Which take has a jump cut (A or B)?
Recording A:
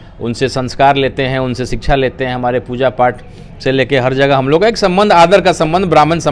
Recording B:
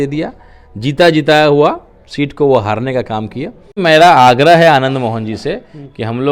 B